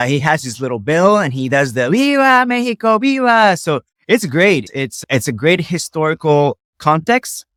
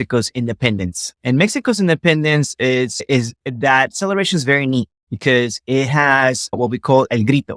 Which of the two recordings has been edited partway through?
second; 1 cut; at 5.0 s

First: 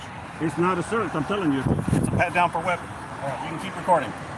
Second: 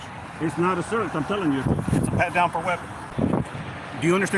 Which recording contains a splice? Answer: second; 1 cut; at 3.1 s

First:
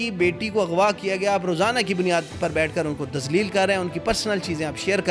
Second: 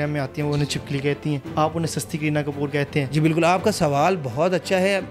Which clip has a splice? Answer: second; 2 cuts; at 1.4 s, 3.1 s

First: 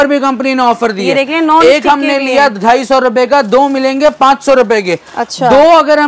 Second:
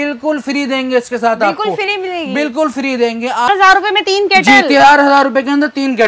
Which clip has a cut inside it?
second; 1 cut; at 3.5 s

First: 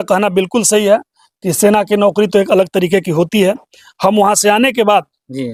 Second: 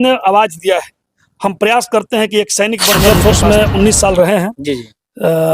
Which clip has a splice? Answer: second; 1 cut; at 2.9 s

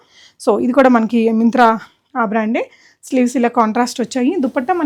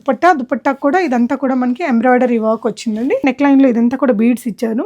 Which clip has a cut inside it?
second; 1 cut; at 3.2 s

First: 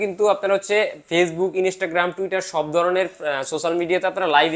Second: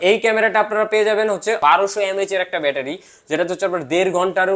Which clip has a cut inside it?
second; 1 cut; at 1.6 s

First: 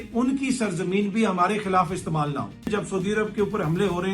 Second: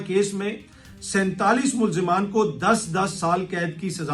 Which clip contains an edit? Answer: first; 1 cut; at 2.7 s

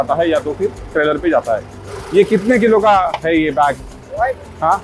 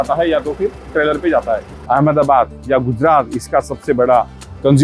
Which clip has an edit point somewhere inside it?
second; 1 cut; at 1.7 s

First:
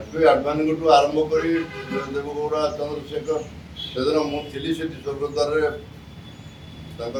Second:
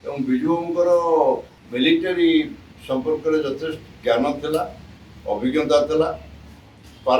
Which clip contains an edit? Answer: second; 1 cut; at 1.6 s

